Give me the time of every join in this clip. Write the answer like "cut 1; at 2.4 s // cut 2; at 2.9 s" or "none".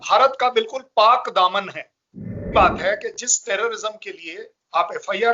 cut 1; at 2.4 s